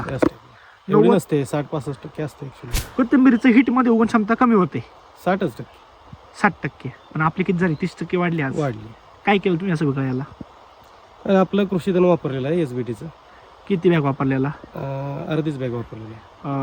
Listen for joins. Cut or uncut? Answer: uncut